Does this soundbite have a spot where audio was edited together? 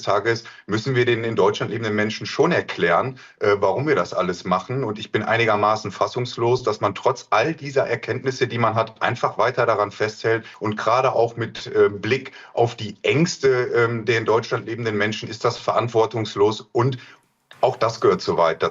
yes; 1 cut; at 10.6 s

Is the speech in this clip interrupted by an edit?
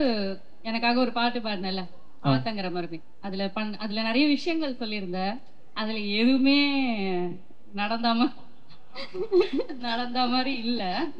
no; 0 cuts

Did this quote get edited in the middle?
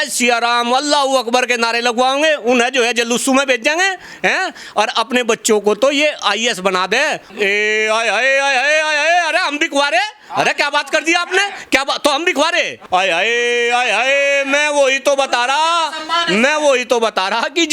yes; 2 cuts; at 7.2 s, 12.8 s

